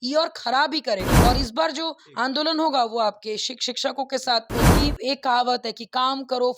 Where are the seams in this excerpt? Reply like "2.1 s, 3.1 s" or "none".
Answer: 1.1 s, 4.7 s